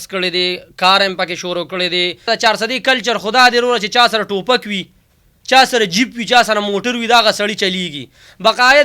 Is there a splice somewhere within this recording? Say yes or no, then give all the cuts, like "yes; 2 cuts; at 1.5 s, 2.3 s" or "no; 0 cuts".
yes; 1 cut; at 2.3 s